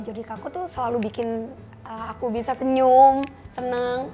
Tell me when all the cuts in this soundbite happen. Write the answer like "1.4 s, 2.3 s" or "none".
none